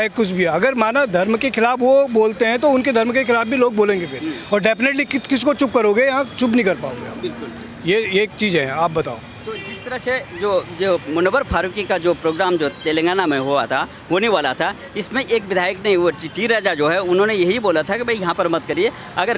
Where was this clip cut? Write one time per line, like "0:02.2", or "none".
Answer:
none